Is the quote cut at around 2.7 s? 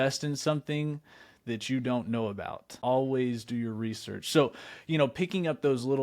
yes; 1 cut; at 2.7 s

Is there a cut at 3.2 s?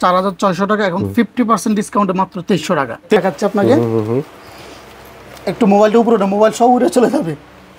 yes; 1 cut; at 3.2 s

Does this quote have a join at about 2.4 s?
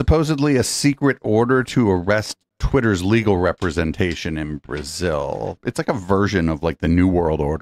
no; 1 cut; at 5.6 s

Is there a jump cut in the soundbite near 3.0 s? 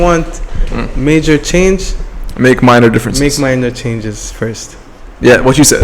no; 0 cuts

